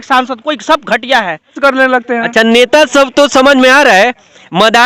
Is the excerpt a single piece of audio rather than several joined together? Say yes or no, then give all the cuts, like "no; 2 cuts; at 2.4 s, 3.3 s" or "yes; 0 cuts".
no; 1 cut; at 1.6 s